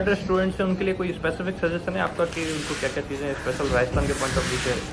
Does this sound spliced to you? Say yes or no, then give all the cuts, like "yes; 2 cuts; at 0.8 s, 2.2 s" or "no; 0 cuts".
no; 0 cuts